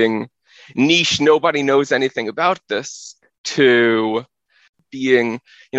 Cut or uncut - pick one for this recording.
cut